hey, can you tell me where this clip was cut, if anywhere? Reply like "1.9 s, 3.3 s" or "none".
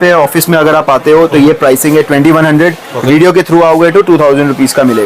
none